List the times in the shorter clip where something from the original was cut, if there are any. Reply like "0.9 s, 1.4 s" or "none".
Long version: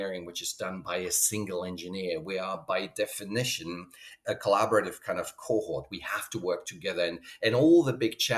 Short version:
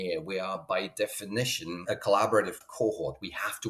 1.8 s, 2.6 s